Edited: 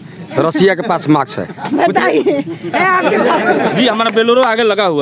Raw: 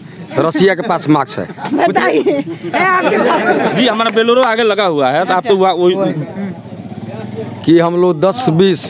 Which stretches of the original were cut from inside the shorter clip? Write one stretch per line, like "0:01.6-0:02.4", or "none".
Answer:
none